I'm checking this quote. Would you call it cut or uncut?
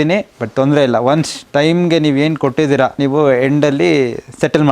cut